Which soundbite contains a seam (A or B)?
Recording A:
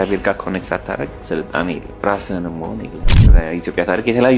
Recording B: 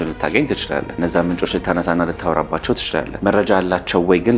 A